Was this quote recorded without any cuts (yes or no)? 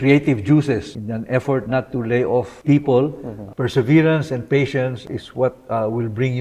no